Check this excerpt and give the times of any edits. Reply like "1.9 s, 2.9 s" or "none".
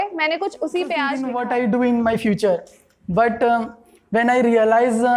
1.2 s